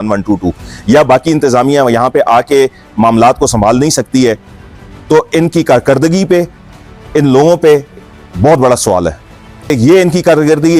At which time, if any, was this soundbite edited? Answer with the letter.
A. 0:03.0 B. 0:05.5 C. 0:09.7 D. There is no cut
C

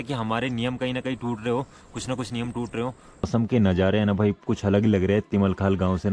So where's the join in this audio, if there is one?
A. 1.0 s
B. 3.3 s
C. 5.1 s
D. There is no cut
B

